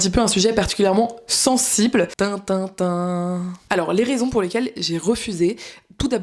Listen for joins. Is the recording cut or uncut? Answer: cut